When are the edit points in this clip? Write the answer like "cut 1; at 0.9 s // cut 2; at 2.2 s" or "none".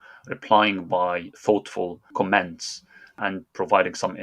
cut 1; at 2.1 s // cut 2; at 3.2 s